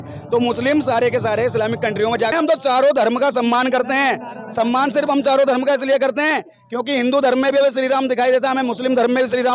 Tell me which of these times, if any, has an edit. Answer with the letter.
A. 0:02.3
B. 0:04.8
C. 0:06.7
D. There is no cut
A